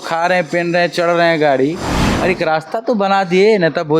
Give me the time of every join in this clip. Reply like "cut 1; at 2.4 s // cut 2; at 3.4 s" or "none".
cut 1; at 2.0 s